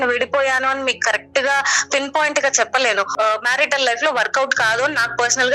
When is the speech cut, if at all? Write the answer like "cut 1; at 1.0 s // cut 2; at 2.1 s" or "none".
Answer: cut 1; at 3.1 s